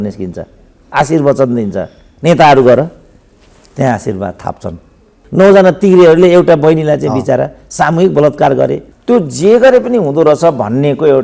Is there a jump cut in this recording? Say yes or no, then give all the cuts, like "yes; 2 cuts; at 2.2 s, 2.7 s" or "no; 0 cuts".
yes; 2 cuts; at 5.2 s, 8.9 s